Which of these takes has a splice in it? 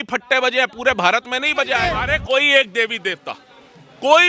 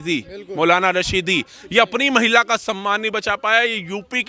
first; 1 cut; at 1.8 s

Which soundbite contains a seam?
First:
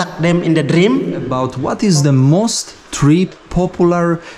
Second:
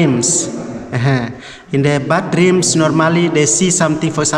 first; 1 cut; at 1.4 s

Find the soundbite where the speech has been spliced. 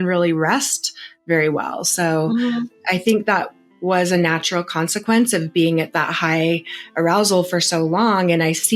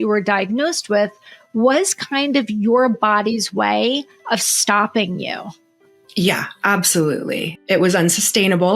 second; 1 cut; at 7.5 s

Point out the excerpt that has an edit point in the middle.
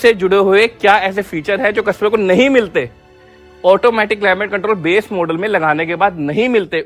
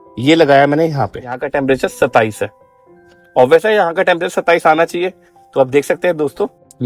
second; 1 cut; at 1.5 s

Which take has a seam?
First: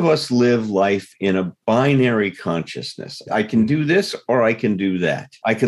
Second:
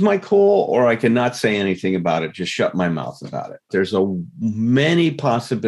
second; 1 cut; at 3.7 s

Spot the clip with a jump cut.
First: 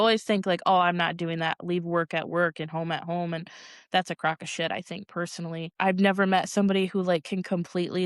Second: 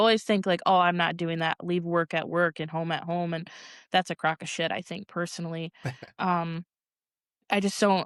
first; 1 cut; at 5.7 s

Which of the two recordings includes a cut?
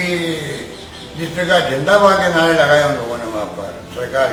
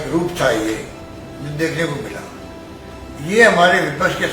second; 1 cut; at 2.6 s

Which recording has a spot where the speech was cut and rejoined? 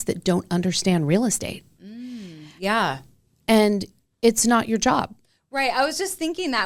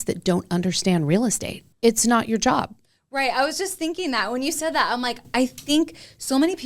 second; 1 cut; at 1.6 s

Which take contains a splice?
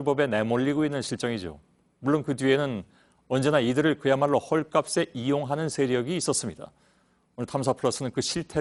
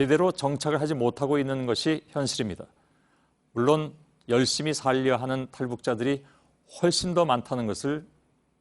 second; 1 cut; at 1.0 s

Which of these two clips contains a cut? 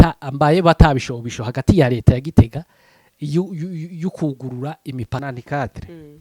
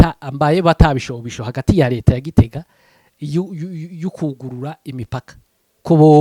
first; 1 cut; at 5.2 s

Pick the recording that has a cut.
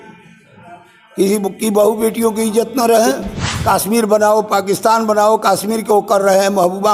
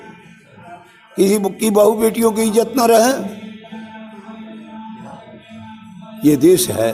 first; 1 cut; at 3.5 s

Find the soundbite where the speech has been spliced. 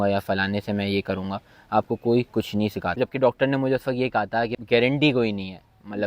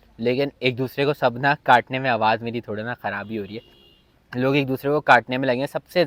first; 2 cuts; at 3.0 s, 4.6 s

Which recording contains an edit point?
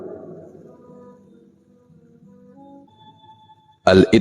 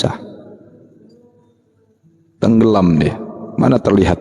first; 1 cut; at 2.8 s

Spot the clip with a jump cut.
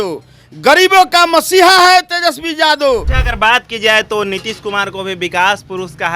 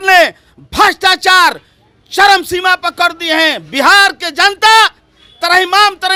first; 1 cut; at 3.2 s

